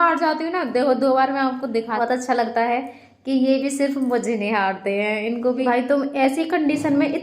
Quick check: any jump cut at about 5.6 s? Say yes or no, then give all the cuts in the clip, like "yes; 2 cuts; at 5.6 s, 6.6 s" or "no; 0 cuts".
yes; 2 cuts; at 2.0 s, 5.6 s